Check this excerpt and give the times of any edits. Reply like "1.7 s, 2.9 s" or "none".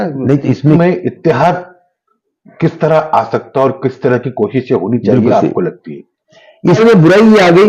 0.8 s, 6.8 s